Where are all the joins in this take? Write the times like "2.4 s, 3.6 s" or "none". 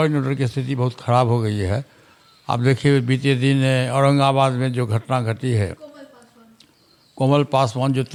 none